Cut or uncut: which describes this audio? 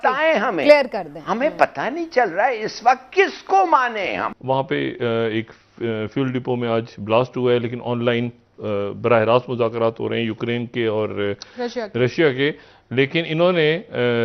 cut